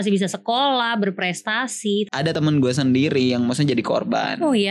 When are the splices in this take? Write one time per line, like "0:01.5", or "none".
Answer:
0:02.3